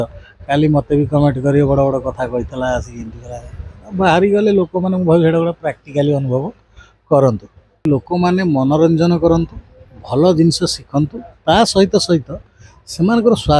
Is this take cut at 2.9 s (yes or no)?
no